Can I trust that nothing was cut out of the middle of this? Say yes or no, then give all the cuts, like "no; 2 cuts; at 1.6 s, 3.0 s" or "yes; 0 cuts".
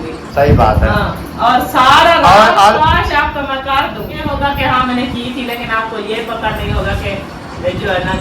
no; 1 cut; at 4.2 s